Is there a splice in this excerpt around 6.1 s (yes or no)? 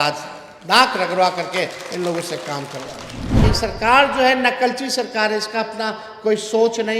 no